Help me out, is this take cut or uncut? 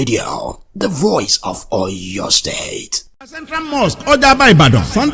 cut